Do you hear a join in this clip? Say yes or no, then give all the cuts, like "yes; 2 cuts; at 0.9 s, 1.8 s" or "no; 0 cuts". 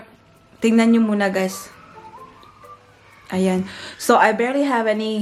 no; 0 cuts